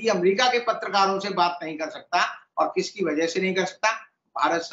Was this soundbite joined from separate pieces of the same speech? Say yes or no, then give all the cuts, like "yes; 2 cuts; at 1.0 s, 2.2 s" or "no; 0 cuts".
no; 0 cuts